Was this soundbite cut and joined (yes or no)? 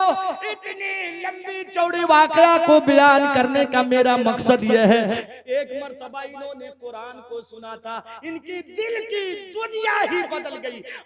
yes